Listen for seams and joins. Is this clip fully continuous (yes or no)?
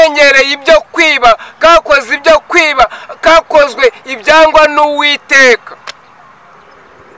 yes